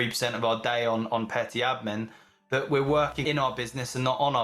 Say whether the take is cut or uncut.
cut